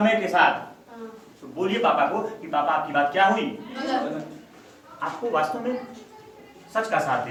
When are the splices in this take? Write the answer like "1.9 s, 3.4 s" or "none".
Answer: none